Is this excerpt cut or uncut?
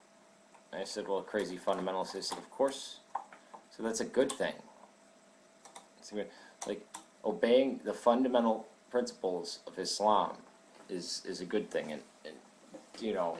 cut